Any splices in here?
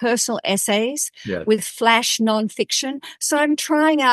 no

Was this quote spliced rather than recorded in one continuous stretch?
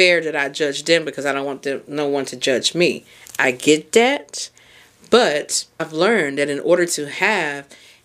yes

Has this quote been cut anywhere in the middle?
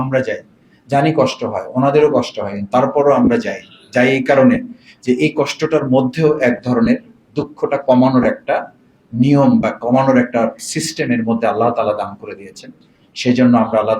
no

